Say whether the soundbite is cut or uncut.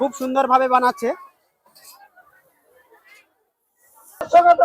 uncut